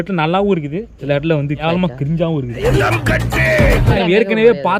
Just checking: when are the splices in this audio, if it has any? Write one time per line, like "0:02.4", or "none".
0:02.7
0:03.9